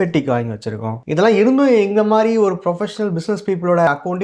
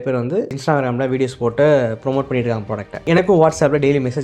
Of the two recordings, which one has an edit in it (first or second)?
first